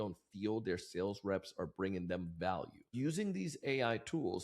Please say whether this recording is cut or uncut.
cut